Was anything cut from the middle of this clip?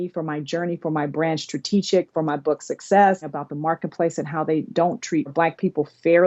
yes; 2 cuts; at 3.3 s, 5.3 s

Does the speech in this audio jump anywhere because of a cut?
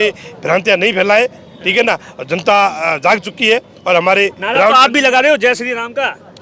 no; 0 cuts

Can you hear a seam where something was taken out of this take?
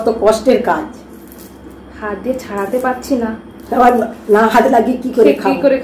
no; 0 cuts

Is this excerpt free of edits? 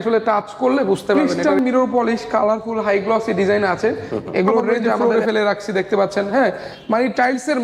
no; 2 cuts; at 1.2 s, 5.0 s

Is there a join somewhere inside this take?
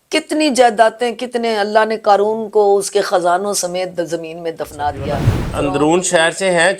yes; 1 cut; at 5.4 s

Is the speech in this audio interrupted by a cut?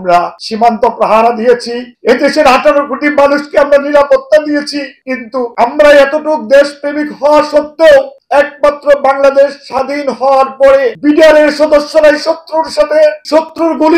no; 0 cuts

